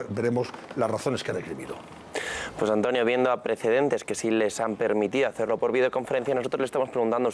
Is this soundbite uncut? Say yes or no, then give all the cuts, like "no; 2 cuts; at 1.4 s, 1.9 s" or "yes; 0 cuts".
yes; 0 cuts